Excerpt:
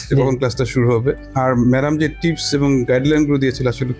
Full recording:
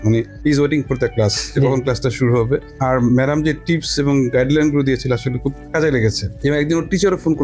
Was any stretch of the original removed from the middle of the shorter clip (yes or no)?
no